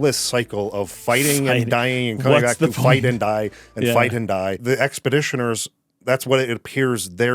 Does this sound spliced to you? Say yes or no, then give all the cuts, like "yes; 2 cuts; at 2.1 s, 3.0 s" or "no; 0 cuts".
yes; 1 cut; at 4.5 s